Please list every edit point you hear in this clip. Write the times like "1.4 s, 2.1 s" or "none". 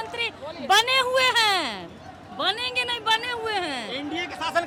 none